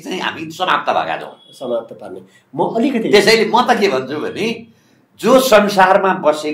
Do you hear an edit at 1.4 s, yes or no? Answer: no